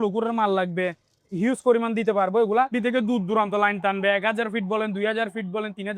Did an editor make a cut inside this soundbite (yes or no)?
yes